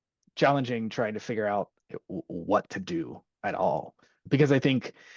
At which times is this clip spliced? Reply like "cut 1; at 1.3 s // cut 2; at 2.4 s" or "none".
cut 1; at 1.8 s // cut 2; at 4.2 s

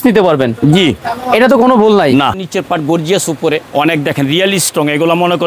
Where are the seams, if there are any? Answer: cut 1; at 2.4 s // cut 2; at 3.7 s

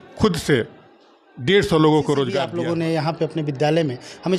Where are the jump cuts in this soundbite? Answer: cut 1; at 2.5 s

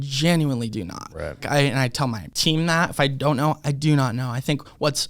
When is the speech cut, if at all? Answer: cut 1; at 1.4 s // cut 2; at 2.3 s

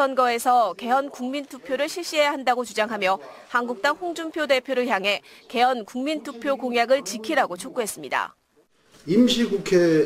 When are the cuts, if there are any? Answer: cut 1; at 6.4 s

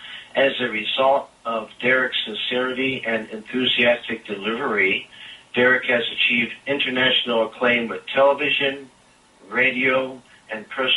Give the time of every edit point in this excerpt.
none

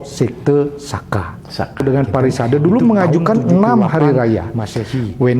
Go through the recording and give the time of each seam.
cut 1; at 1.8 s

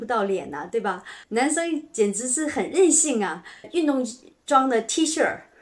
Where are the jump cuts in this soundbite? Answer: cut 1; at 1.1 s // cut 2; at 3.7 s

